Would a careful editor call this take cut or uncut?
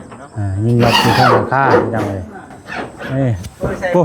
cut